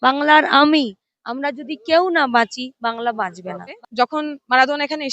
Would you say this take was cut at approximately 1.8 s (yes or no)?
no